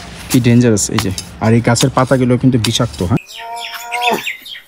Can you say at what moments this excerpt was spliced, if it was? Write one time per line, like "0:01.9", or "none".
0:03.2